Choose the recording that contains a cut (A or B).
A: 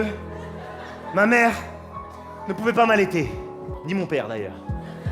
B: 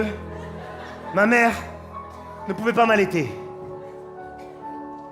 A